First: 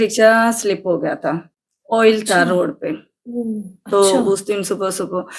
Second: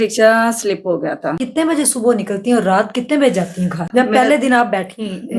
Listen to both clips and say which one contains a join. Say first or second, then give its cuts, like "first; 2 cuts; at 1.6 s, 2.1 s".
second; 2 cuts; at 1.4 s, 3.9 s